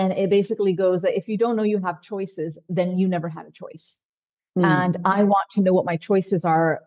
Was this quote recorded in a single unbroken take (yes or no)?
yes